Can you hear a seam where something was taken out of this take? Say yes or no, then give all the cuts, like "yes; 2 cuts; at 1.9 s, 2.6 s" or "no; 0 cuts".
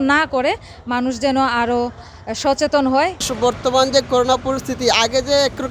no; 0 cuts